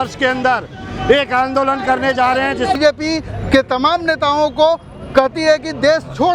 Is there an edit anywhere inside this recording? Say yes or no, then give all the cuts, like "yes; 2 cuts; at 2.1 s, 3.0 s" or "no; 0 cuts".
yes; 1 cut; at 2.8 s